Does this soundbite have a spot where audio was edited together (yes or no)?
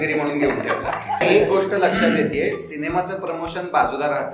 yes